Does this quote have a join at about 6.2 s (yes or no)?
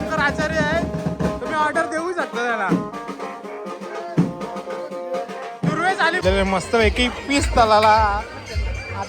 yes